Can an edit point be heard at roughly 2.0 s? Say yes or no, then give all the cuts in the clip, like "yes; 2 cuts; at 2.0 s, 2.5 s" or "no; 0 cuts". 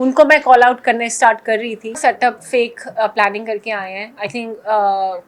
yes; 1 cut; at 2.0 s